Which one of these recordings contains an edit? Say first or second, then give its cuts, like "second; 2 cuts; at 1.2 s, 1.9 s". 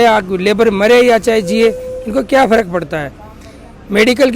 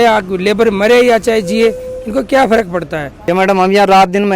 second; 1 cut; at 3.1 s